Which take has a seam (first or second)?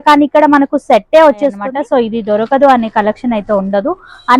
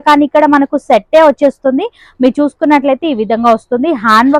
first